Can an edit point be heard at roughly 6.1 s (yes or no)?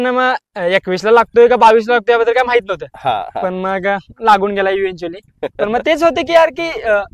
no